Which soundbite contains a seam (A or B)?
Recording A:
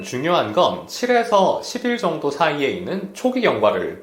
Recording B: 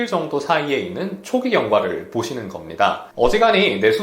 B